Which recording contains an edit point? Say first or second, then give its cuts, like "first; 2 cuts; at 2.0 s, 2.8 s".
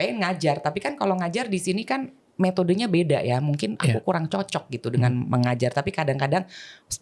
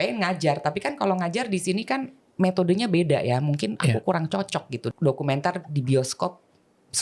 second; 1 cut; at 4.8 s